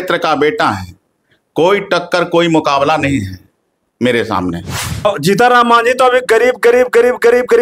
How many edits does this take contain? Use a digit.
1